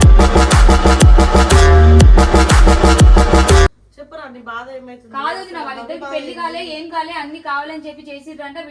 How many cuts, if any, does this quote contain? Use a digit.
0